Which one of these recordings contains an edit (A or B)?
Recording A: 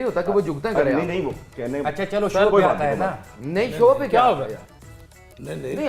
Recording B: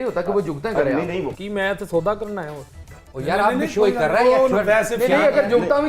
B